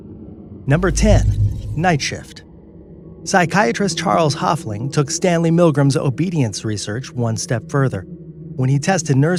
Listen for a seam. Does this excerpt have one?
no; 0 cuts

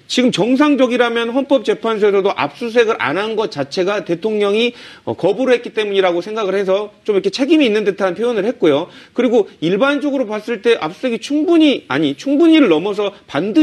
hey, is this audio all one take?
yes; 0 cuts

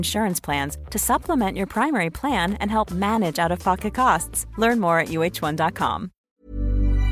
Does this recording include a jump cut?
yes; 1 cut; at 6.2 s

